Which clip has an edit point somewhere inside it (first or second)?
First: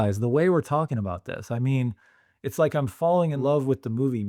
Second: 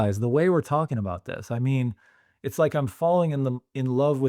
first